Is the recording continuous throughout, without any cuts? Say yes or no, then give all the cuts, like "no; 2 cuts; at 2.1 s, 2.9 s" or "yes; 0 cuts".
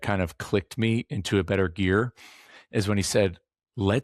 yes; 0 cuts